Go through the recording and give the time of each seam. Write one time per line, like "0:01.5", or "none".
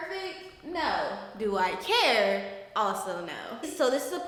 none